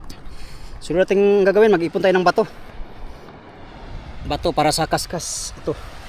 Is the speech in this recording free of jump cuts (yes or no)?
yes